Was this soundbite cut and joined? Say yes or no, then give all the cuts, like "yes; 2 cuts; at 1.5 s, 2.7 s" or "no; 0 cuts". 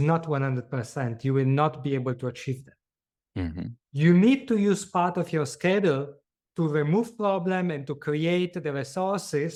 no; 0 cuts